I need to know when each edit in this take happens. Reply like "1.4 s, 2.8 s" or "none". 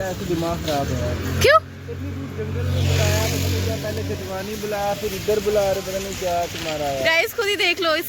none

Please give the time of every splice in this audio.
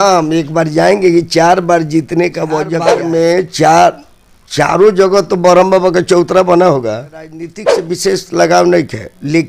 2.9 s, 7.7 s

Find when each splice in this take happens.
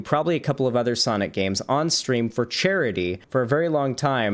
3.2 s

